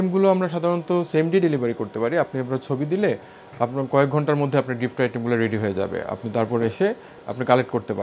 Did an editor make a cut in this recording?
no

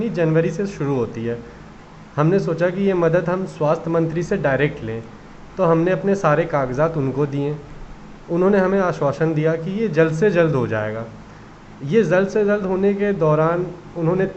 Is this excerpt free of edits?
yes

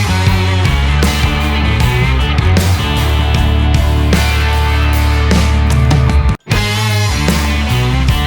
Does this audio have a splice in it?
yes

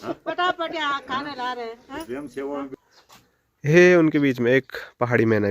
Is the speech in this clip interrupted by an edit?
yes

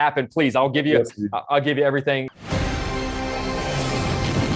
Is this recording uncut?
no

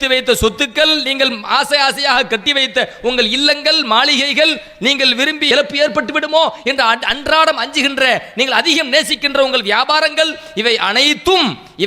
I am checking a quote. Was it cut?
yes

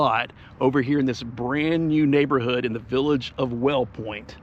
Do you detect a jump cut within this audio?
no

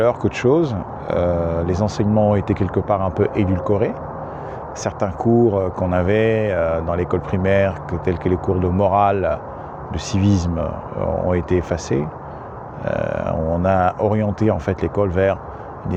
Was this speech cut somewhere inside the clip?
no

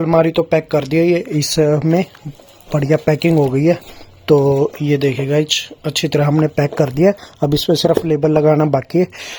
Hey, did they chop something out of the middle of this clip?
no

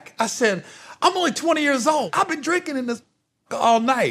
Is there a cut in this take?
yes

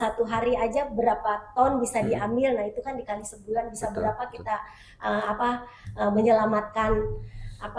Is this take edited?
no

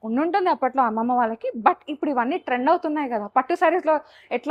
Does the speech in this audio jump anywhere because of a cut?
no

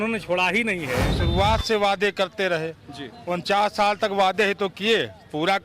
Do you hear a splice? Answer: yes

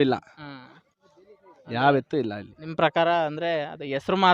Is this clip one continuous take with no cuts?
yes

